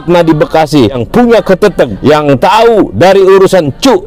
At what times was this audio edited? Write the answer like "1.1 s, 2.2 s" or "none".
1.0 s, 1.9 s